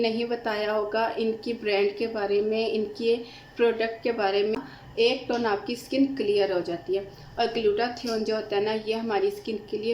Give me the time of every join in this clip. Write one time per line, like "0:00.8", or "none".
0:04.5